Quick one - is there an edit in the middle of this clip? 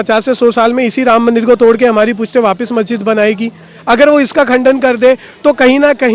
no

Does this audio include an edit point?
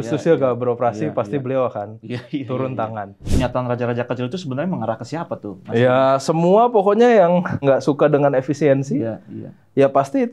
yes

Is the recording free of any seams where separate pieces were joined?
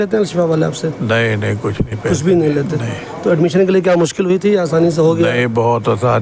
yes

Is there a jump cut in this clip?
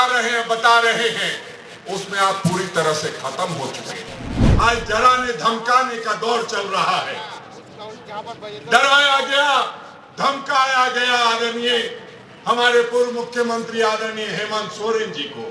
yes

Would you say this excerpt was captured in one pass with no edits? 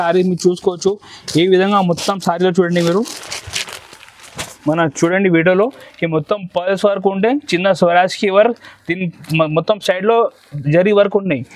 yes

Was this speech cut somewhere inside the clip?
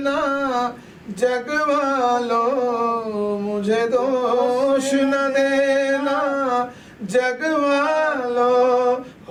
no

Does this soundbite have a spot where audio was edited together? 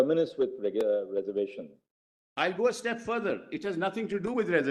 no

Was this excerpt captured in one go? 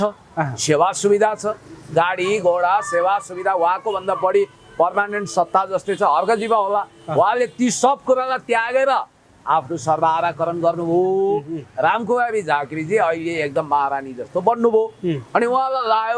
yes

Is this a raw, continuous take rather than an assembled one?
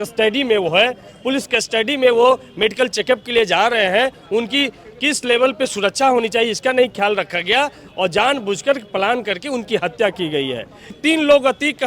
no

